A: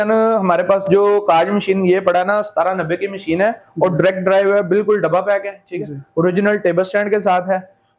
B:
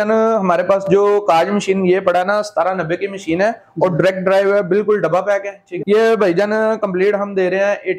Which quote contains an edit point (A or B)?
B